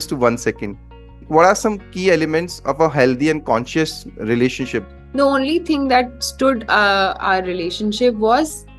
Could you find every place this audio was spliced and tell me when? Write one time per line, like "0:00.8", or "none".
0:01.3
0:04.9